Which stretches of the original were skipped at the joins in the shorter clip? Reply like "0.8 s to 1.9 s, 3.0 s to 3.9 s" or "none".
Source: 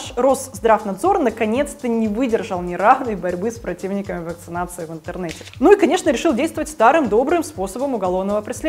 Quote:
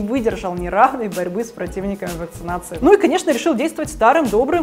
4.8 s to 5.5 s